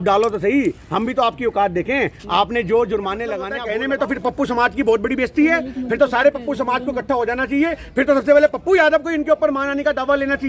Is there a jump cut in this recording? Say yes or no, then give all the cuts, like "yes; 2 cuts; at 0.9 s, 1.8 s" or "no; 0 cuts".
yes; 1 cut; at 3.5 s